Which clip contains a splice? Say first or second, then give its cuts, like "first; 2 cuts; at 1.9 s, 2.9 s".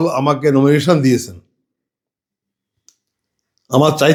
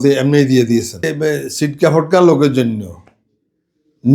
second; 1 cut; at 1.1 s